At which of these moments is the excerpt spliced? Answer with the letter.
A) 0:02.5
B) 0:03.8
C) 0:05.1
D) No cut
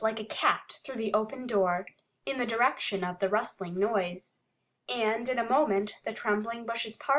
A